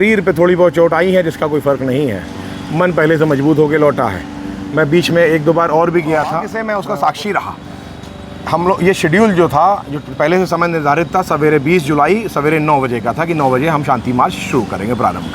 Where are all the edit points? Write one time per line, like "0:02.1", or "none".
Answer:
0:06.5